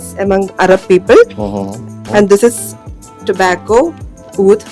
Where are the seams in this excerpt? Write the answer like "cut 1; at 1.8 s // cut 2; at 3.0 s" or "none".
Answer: none